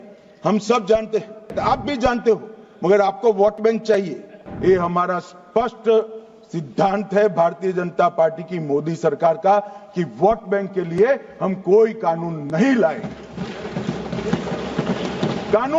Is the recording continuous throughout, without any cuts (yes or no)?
no